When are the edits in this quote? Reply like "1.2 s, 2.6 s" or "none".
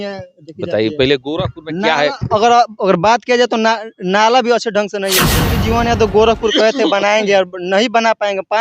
5.5 s